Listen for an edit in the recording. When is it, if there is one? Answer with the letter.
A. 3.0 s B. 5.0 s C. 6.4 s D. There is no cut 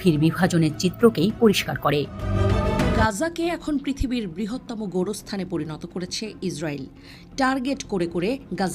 A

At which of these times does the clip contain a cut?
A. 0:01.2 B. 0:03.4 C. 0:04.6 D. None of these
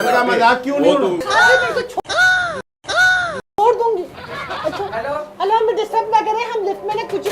A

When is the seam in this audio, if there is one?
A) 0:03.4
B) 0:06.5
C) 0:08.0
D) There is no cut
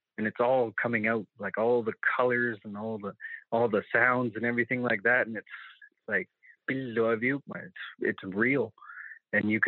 D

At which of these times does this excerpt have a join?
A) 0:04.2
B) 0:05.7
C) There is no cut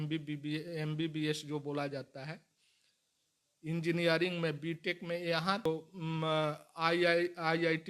B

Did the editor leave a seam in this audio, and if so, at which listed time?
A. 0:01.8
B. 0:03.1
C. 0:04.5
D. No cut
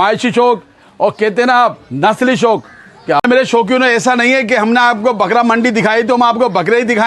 B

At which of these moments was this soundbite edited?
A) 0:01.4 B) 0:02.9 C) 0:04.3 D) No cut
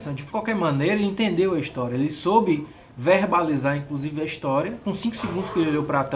D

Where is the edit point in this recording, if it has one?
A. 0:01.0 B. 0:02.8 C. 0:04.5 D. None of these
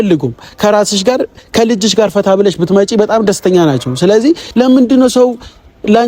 C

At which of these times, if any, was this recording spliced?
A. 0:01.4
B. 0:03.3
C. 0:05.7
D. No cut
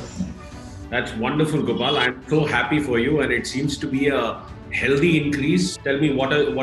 C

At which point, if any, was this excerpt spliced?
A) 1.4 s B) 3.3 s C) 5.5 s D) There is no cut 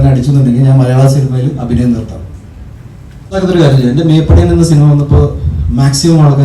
B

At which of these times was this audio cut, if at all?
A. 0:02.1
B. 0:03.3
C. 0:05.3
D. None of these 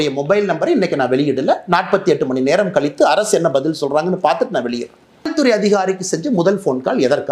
C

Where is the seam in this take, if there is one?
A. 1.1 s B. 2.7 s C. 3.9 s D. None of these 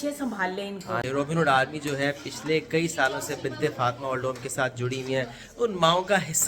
A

